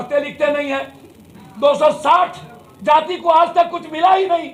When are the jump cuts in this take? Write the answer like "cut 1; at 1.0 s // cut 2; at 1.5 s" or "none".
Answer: none